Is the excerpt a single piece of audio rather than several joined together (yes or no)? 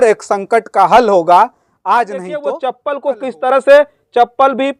no